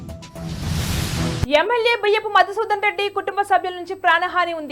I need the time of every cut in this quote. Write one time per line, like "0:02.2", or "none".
0:00.9